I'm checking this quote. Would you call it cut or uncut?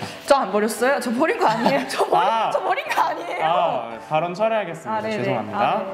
uncut